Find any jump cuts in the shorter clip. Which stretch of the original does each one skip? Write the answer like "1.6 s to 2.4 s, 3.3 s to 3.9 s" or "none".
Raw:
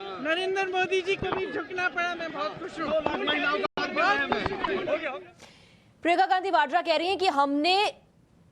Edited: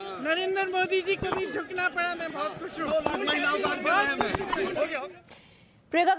3.7 s to 3.8 s